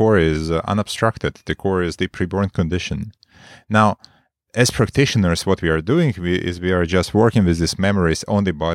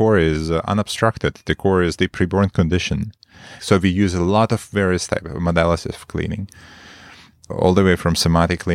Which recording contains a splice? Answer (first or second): second